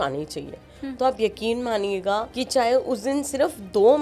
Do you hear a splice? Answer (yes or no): yes